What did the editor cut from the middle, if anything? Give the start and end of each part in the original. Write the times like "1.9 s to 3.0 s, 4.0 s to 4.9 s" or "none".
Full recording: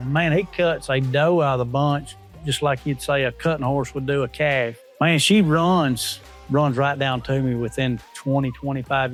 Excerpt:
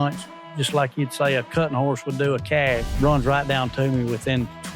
4.8 s to 6.4 s